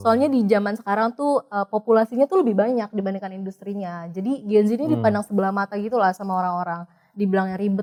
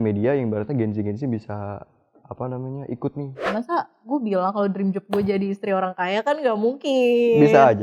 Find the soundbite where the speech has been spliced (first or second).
second